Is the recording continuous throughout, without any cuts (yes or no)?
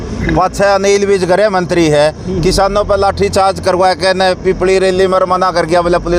yes